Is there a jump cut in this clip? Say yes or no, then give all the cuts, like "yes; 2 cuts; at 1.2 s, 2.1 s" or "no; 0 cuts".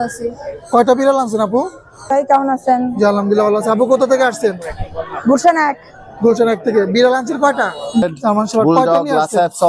yes; 2 cuts; at 2.1 s, 8.1 s